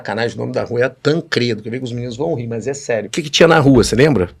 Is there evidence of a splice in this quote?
yes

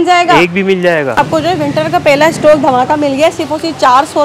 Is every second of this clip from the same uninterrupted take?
no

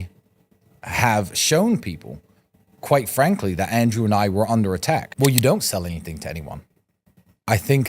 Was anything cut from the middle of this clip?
yes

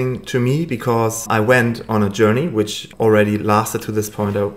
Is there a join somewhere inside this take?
yes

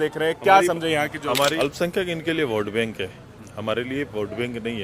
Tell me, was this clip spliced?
yes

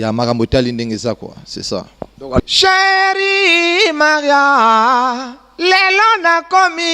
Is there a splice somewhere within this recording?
yes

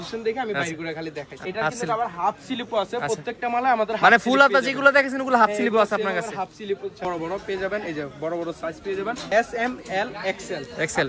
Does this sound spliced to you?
yes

